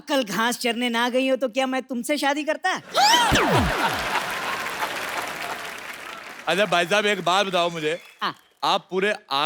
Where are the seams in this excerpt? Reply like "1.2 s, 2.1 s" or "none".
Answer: none

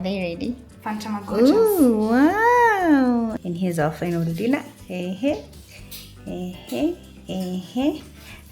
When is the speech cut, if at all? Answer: 3.4 s

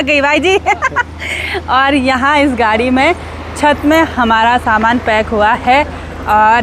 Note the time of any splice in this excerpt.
none

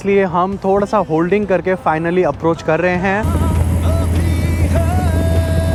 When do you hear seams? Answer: none

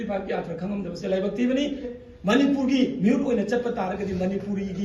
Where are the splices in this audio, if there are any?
1.9 s

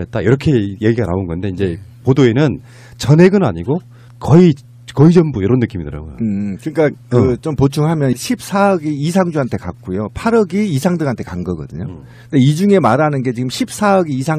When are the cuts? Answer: none

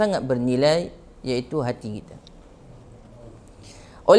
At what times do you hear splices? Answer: none

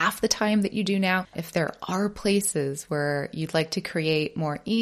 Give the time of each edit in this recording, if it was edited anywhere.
1.4 s

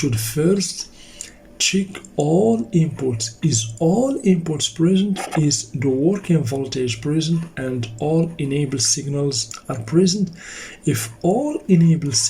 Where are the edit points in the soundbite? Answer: 9.5 s

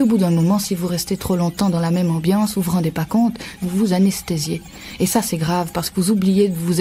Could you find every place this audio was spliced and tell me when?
3.6 s

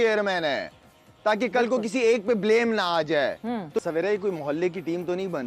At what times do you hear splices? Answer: 3.2 s

